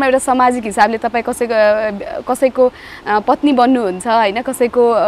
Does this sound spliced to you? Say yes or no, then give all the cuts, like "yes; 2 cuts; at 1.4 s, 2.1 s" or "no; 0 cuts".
no; 0 cuts